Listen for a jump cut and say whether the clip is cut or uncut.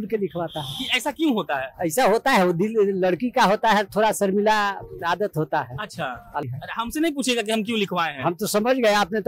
cut